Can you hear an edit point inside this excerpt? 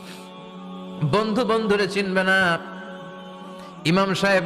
yes; 1 cut; at 1.0 s

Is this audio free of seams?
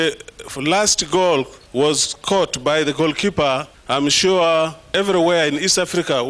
no; 3 cuts; at 1.6 s, 3.7 s, 4.9 s

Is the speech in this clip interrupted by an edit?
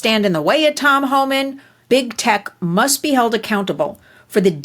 yes; 1 cut; at 1.8 s

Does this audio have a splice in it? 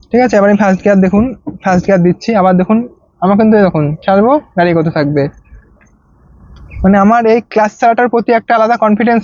no; 0 cuts

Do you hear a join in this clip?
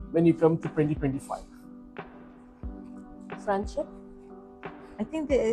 no; 0 cuts

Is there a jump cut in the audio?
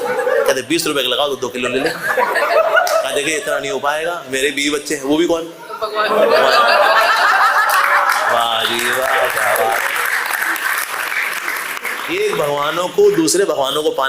no; 0 cuts

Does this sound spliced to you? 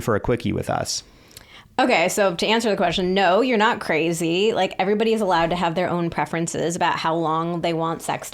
no; 0 cuts

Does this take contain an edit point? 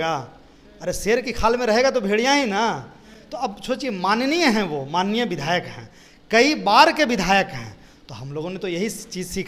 no; 0 cuts

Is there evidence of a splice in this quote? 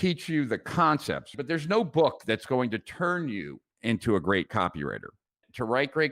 yes; 1 cut; at 1.3 s

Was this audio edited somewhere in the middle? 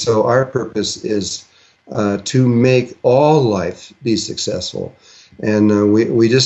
no; 0 cuts

